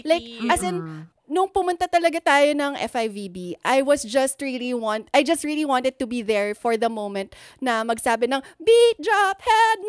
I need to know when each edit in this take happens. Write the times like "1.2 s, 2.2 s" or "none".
none